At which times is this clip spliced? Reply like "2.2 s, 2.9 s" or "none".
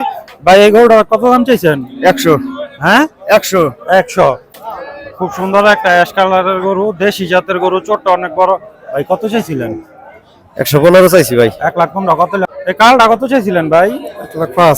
4.5 s, 12.5 s